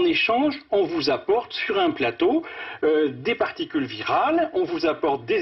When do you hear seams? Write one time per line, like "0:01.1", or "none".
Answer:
none